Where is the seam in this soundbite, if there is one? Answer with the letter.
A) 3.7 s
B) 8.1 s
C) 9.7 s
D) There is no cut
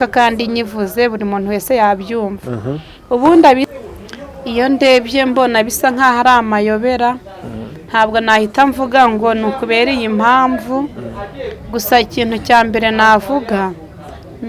A